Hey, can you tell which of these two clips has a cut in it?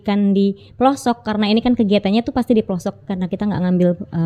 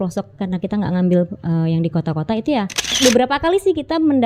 second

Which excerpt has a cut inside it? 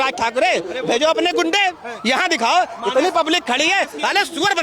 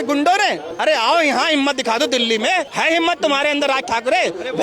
second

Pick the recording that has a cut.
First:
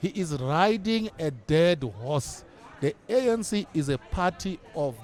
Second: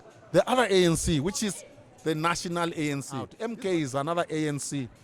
second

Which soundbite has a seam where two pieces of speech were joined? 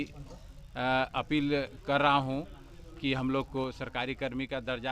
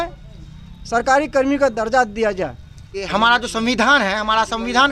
second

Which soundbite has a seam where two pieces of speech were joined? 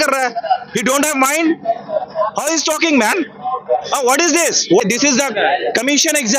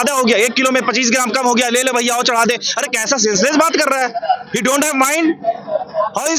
first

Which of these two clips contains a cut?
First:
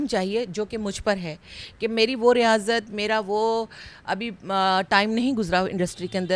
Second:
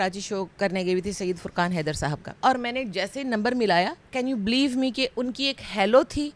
second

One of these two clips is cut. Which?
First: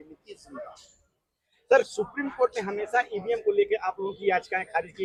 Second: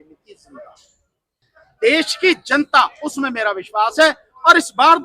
second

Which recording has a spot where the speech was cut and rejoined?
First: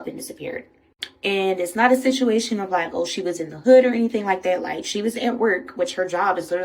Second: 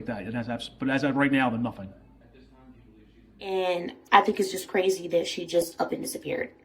second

